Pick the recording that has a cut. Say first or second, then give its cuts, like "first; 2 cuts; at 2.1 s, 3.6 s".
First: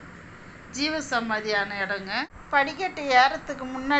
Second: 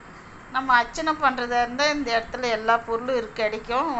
first; 1 cut; at 2.4 s